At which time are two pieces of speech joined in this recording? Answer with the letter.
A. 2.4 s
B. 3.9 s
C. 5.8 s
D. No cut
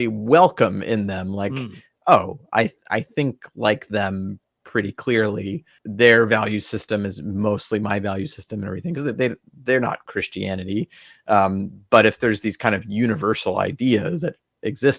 C